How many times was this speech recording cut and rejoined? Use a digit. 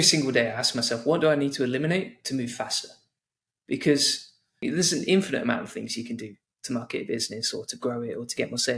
1